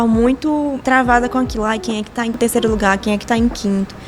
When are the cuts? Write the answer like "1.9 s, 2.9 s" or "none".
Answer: 0.8 s, 2.3 s

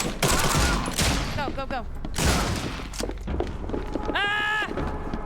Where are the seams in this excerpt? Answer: 2.1 s

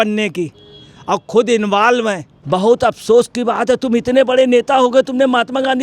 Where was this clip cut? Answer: 2.3 s

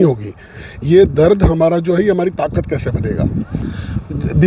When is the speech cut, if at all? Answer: 3.6 s

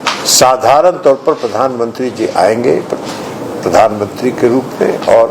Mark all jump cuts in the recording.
none

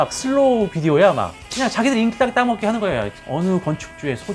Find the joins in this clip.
3.2 s

